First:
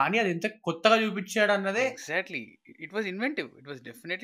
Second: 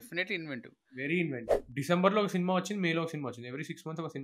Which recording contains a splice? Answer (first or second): second